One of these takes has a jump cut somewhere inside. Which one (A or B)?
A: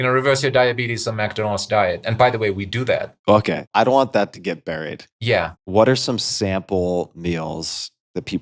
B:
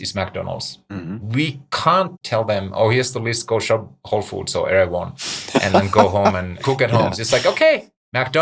B